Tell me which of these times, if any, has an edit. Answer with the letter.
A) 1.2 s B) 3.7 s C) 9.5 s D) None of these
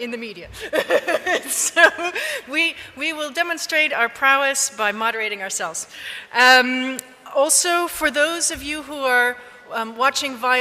A